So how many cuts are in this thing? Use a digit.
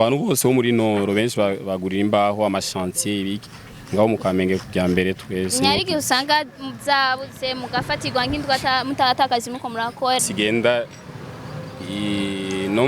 1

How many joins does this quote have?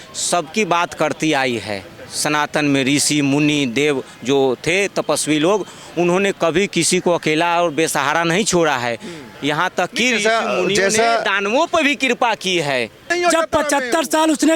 1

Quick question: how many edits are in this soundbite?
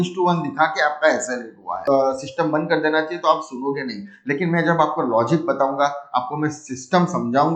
1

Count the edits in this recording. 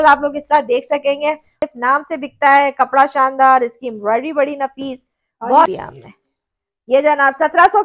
2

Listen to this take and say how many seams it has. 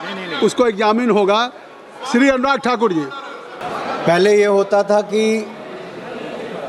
1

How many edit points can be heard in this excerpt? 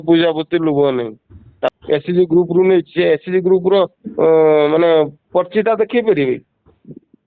1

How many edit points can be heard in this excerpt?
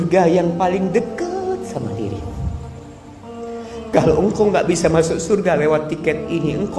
0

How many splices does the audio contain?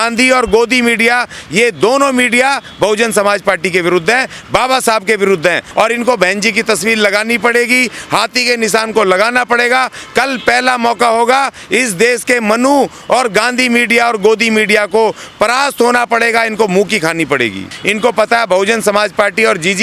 2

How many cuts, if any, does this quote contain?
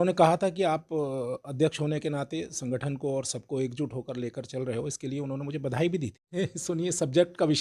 1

